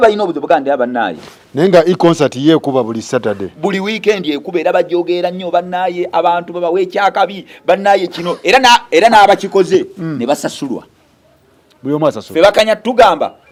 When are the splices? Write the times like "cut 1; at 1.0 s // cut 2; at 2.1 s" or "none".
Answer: none